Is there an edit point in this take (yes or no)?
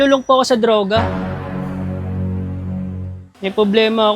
yes